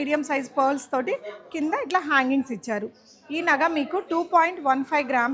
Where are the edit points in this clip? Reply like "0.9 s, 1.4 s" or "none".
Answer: none